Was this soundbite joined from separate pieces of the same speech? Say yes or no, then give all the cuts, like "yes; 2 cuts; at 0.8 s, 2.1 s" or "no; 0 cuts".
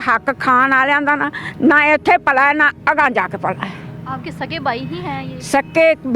no; 0 cuts